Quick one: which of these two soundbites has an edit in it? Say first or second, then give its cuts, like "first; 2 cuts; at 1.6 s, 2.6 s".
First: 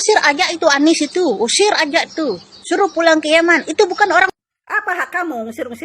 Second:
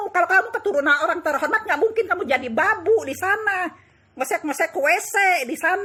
first; 1 cut; at 4.5 s